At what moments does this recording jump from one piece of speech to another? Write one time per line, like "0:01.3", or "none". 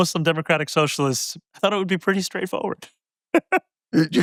none